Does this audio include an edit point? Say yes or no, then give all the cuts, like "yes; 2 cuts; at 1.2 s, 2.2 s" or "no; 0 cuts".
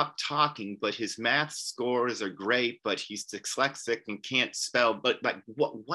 no; 0 cuts